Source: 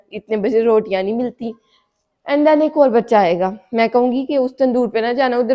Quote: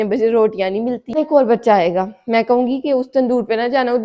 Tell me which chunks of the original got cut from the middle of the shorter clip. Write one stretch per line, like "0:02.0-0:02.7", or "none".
0:01.5-0:02.6

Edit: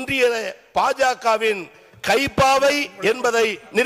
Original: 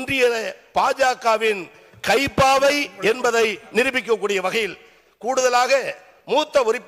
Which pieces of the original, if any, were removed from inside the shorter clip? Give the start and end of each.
none

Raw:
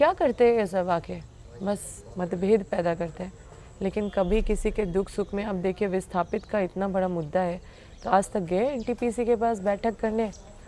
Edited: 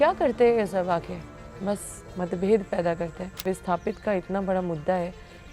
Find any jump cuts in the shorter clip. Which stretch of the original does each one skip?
0:03.4-0:05.9

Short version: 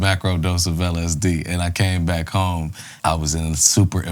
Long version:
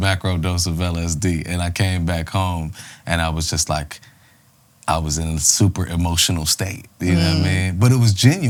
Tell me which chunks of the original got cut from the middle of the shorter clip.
0:02.8-0:04.7

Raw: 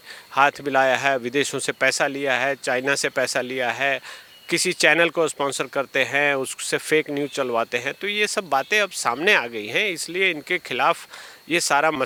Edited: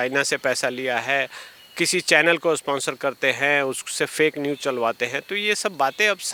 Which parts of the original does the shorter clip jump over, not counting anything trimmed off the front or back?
none

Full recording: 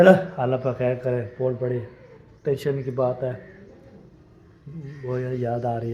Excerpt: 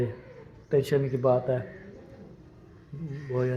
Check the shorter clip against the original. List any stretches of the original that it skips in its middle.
none

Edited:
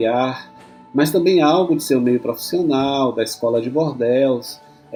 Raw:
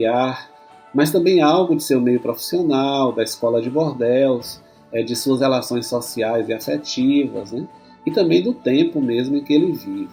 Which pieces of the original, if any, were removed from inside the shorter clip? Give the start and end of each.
none

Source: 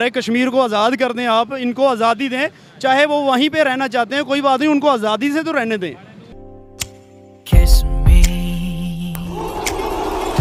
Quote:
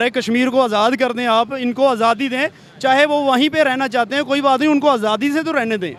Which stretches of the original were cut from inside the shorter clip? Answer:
none

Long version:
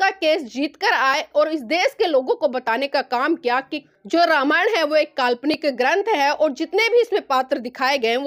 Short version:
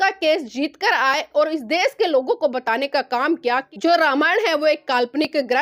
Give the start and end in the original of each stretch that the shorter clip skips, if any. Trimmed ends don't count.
0:03.7-0:04.0

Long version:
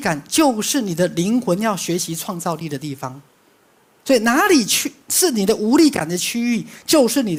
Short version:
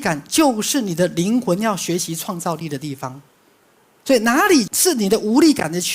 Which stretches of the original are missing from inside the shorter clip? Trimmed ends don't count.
0:04.7-0:05.1

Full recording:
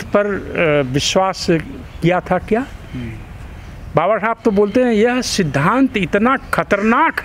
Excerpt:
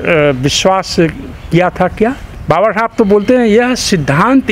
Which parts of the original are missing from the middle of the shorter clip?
0:02.8-0:03.8

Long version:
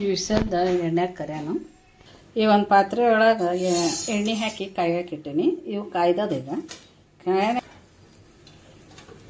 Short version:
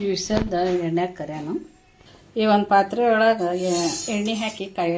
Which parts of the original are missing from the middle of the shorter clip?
none

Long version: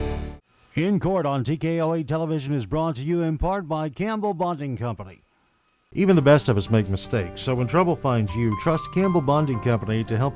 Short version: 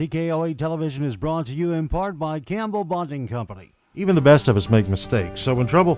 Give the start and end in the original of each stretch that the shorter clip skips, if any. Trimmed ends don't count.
0:05.5-0:06.0

